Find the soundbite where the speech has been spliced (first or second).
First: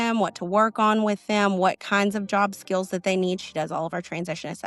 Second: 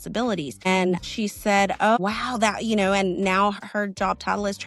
second